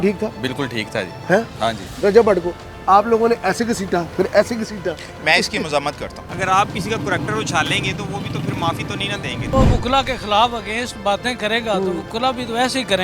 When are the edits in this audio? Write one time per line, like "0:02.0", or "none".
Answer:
0:01.9
0:06.2
0:09.5